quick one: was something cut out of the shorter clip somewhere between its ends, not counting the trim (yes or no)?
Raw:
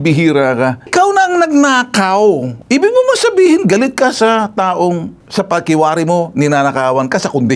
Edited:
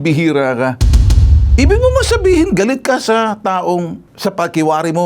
yes